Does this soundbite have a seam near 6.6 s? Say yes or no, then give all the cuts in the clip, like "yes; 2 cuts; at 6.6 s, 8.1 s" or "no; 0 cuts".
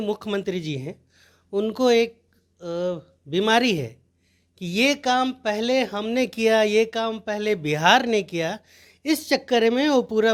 no; 0 cuts